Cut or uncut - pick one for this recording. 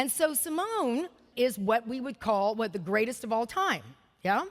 cut